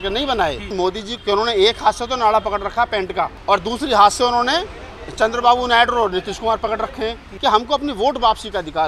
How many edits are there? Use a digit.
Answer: 3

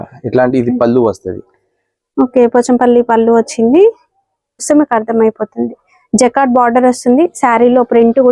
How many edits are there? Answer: 1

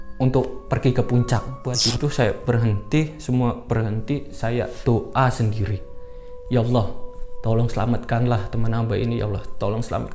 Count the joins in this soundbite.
1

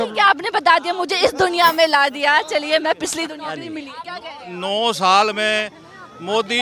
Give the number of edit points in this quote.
1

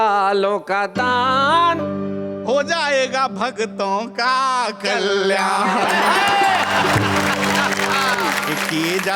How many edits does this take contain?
0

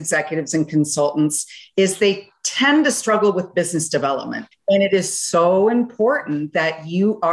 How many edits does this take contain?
1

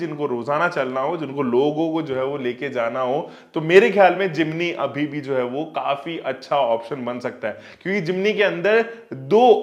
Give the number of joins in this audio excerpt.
0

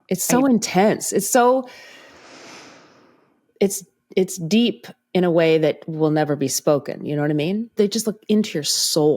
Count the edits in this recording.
1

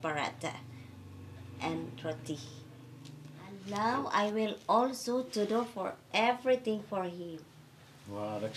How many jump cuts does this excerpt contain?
1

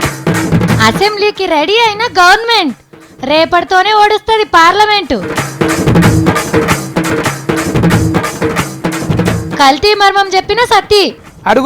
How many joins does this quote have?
1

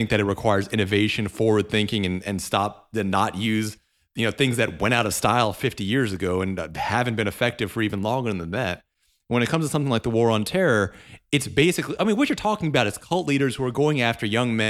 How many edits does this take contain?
0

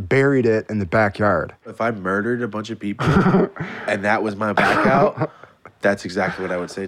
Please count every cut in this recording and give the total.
1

